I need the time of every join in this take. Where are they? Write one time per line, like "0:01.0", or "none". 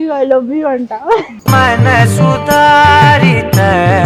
0:01.3